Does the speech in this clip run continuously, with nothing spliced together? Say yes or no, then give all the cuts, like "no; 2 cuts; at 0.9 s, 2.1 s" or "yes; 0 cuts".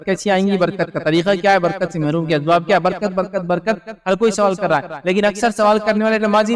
yes; 0 cuts